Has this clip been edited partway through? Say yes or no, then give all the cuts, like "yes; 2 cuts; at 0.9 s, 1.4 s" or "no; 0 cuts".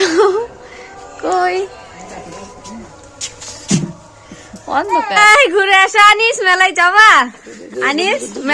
yes; 1 cut; at 5.2 s